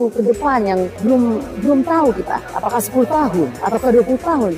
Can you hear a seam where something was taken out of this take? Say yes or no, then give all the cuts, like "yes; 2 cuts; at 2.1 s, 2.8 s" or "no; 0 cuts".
yes; 3 cuts; at 1.0 s, 2.5 s, 3.6 s